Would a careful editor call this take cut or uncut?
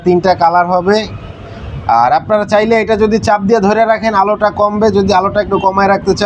uncut